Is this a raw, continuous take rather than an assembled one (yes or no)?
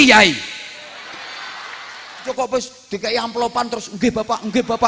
no